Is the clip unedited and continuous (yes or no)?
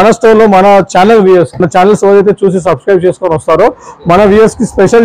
no